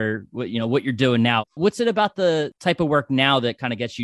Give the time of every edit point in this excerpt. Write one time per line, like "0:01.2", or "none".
0:01.5
0:02.5